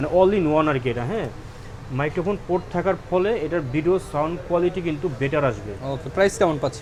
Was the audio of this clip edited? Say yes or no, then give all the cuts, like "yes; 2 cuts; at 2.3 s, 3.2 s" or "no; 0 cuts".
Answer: no; 0 cuts